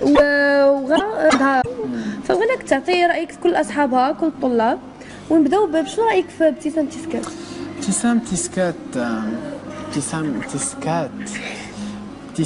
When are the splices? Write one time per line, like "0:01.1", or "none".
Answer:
0:08.5